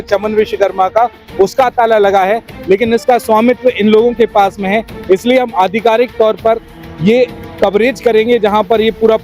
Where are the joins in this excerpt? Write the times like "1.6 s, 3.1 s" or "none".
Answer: none